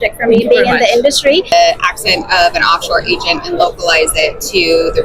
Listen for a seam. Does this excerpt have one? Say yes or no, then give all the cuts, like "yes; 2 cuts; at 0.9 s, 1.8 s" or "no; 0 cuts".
yes; 1 cut; at 1.5 s